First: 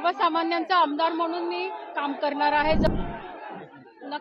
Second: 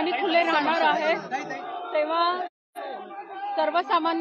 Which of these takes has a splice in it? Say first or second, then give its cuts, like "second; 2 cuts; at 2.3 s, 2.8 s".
first; 1 cut; at 2.9 s